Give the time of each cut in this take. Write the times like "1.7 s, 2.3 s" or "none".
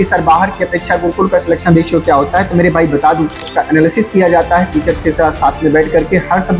3.4 s

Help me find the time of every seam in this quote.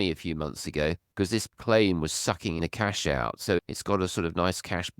2.6 s

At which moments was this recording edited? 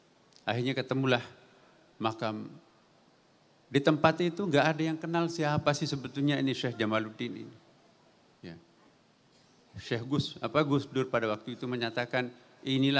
none

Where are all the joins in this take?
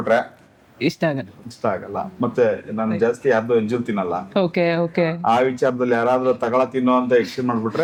none

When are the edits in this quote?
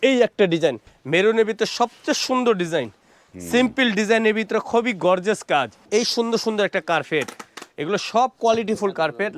0.9 s, 5.8 s

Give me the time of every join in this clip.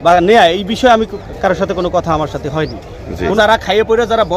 3.4 s

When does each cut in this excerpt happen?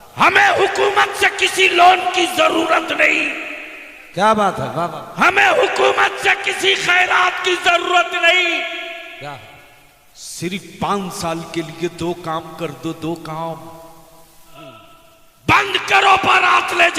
14.5 s

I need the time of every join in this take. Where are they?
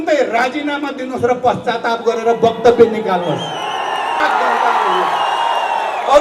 4.2 s

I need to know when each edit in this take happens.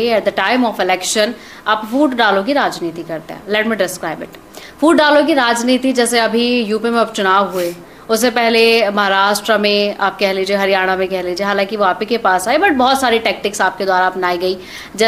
none

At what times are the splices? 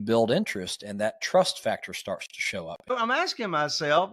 2.9 s

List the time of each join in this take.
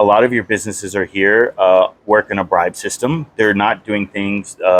none

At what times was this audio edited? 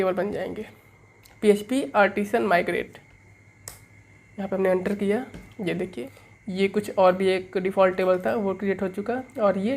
6.0 s

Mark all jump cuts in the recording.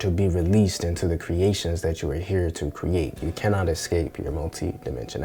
none

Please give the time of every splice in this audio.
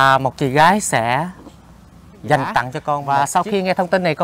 3.0 s

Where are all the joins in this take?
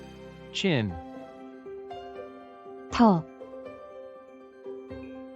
1.0 s, 2.5 s

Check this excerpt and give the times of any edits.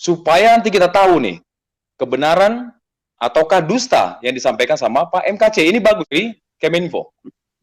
6.1 s

